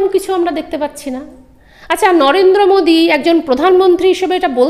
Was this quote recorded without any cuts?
yes; 0 cuts

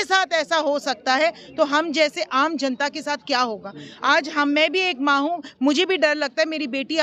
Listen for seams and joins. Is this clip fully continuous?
yes; 0 cuts

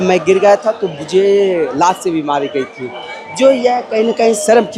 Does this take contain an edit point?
no; 0 cuts

